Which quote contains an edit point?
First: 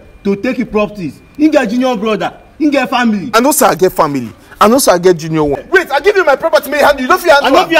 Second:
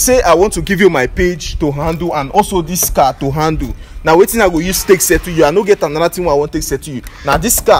first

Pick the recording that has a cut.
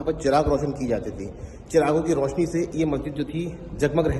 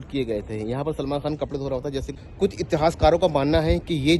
second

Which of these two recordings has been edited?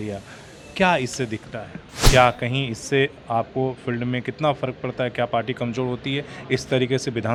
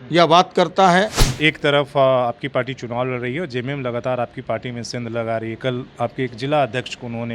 second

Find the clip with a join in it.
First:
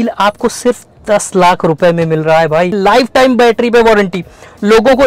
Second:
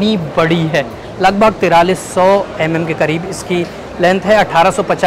first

